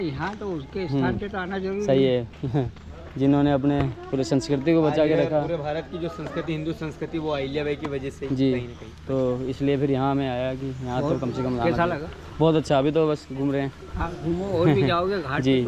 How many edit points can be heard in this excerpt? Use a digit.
0